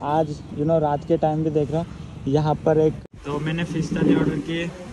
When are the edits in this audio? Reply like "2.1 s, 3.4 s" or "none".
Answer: 3.1 s